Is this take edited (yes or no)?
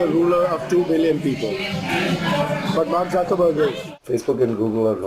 yes